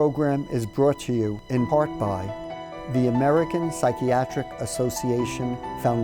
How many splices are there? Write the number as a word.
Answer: one